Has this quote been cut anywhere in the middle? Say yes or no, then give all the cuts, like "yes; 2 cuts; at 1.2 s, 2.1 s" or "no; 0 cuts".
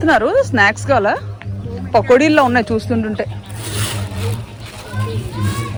no; 0 cuts